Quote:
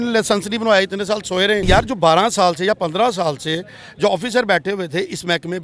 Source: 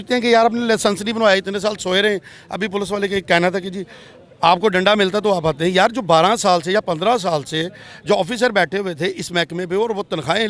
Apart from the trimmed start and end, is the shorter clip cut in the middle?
yes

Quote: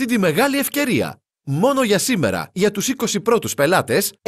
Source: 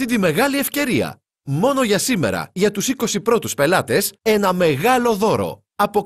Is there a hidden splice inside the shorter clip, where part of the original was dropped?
no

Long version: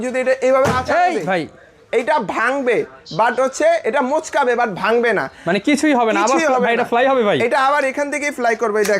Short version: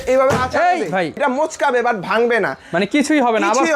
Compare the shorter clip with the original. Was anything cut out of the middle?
yes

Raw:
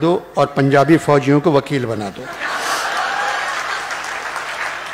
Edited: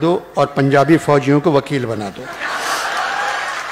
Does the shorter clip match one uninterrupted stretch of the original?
yes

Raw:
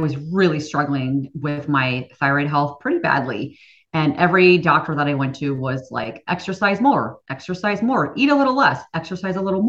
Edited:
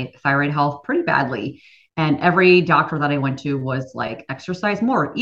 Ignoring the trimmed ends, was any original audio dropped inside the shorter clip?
yes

